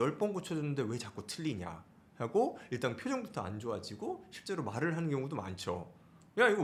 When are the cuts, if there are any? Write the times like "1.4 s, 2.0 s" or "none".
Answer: none

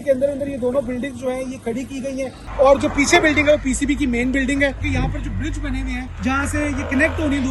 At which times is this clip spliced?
2.4 s, 4.8 s, 6.1 s

